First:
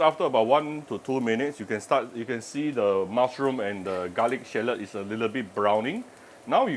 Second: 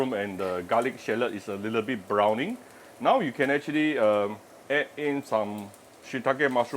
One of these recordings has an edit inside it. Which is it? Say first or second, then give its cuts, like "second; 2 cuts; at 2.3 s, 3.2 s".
second; 1 cut; at 4.5 s